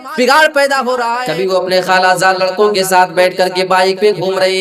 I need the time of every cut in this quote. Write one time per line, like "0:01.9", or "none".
0:01.1